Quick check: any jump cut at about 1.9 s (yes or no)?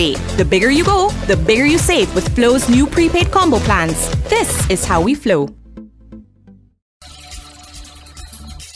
no